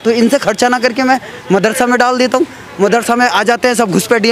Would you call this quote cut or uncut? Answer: uncut